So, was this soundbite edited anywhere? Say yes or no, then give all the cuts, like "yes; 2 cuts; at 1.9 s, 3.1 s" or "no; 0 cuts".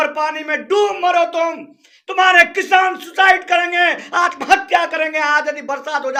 no; 0 cuts